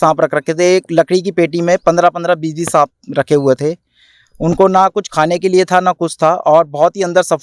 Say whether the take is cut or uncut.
uncut